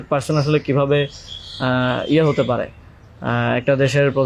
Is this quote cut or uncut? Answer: uncut